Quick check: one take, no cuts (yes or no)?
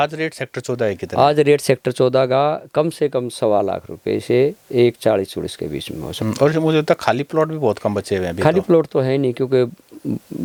yes